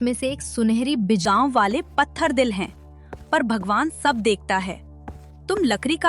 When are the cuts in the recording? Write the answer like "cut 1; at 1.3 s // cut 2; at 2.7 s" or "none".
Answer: cut 1; at 1.2 s